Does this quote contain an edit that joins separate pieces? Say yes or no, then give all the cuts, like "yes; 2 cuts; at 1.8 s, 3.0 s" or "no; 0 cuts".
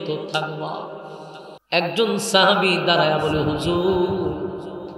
yes; 1 cut; at 1.5 s